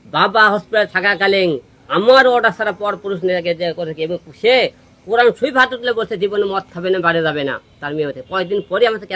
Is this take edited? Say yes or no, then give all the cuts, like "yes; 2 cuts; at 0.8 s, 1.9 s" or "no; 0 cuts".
no; 0 cuts